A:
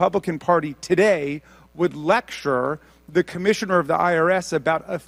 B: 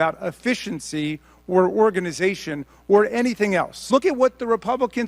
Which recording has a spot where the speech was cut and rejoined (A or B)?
B